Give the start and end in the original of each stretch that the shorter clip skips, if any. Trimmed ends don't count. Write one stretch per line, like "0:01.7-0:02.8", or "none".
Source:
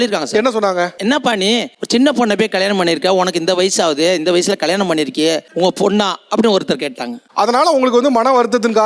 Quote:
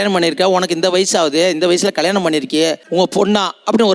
none